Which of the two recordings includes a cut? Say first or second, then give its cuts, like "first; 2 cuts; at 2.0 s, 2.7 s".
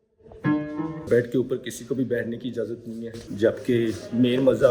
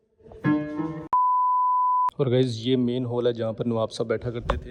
first; 1 cut; at 1.0 s